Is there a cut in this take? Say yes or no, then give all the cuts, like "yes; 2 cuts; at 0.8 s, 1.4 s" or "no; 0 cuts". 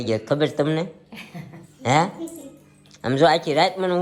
no; 0 cuts